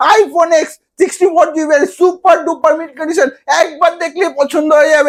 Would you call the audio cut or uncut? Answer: uncut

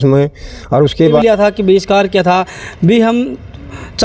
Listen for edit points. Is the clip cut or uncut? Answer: cut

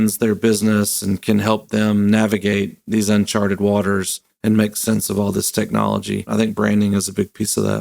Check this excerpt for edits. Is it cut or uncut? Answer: cut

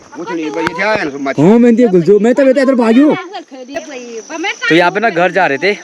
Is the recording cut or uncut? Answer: cut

